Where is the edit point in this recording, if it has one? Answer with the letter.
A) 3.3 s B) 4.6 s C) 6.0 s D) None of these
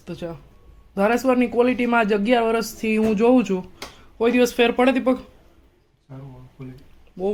D